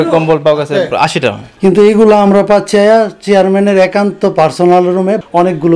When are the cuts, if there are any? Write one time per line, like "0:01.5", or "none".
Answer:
0:01.5